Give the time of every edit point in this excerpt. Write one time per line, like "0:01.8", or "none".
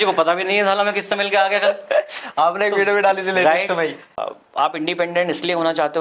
0:04.2